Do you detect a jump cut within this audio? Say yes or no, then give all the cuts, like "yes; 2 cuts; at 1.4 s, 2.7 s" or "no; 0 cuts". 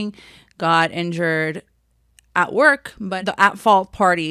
yes; 1 cut; at 3.1 s